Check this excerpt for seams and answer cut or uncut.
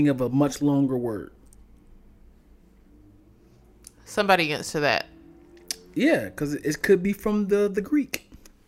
uncut